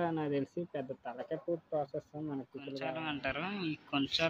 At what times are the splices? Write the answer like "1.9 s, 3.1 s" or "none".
2.9 s